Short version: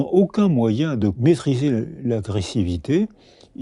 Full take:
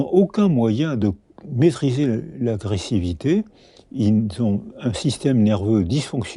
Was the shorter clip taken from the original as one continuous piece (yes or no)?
no